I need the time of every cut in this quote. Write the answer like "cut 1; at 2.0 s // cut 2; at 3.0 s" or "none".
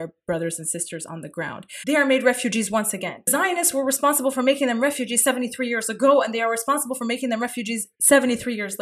cut 1; at 1.6 s // cut 2; at 3.3 s // cut 3; at 7.9 s